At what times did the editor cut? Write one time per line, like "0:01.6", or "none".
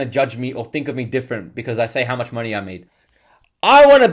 0:02.8